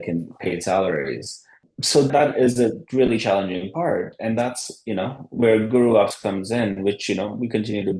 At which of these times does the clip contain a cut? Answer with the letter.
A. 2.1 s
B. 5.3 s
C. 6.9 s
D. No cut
A